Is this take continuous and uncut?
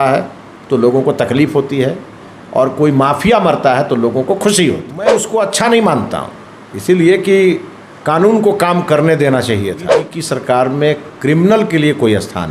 no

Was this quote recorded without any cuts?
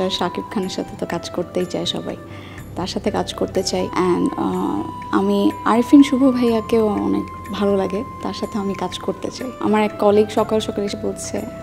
no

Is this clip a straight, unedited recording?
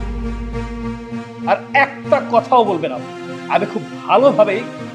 yes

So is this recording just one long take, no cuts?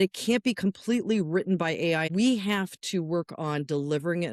no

